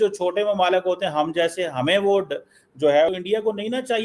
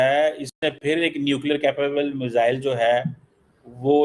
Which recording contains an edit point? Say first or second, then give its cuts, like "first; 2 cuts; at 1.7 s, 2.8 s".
first; 1 cut; at 3.1 s